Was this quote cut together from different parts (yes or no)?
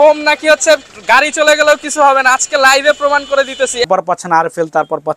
yes